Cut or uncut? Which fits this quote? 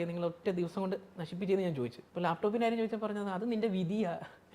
cut